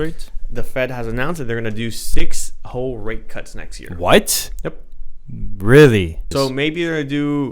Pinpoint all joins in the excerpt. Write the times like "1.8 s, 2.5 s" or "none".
6.2 s